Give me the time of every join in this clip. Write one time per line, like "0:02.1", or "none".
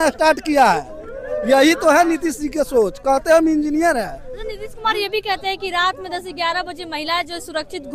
none